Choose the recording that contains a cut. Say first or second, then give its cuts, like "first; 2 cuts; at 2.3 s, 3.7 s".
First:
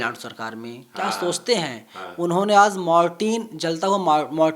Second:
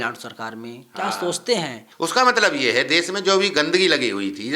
second; 1 cut; at 1.8 s